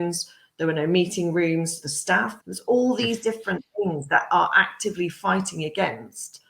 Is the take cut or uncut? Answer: cut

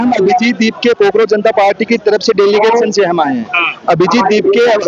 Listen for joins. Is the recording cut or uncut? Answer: uncut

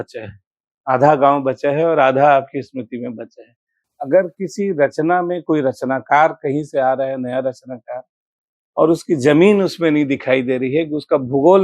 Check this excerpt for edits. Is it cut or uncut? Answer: cut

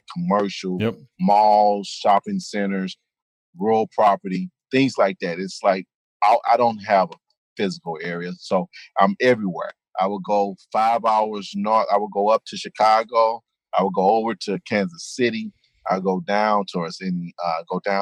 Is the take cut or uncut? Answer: uncut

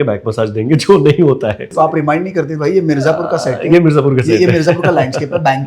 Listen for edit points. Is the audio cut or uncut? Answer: cut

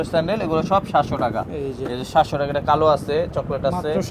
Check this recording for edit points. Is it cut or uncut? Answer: uncut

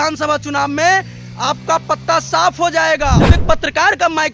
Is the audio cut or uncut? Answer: cut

